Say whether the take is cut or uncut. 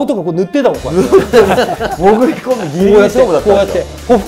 uncut